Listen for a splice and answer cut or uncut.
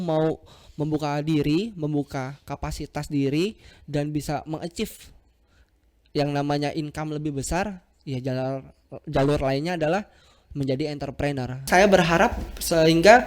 cut